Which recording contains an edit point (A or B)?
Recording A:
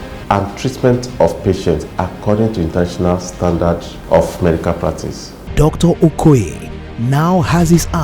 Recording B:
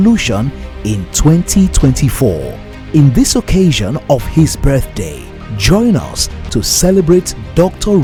A